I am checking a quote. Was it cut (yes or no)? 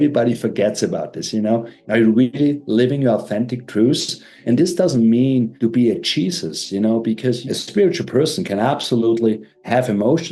yes